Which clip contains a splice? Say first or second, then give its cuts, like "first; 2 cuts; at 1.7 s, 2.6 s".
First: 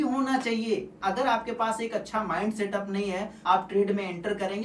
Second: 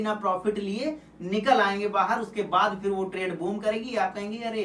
first; 2 cuts; at 0.9 s, 3.3 s